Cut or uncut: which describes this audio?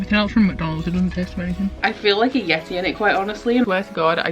cut